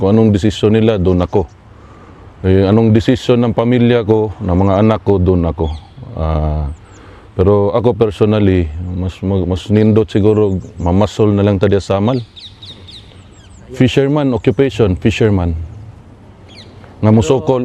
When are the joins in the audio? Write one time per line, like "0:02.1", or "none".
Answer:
none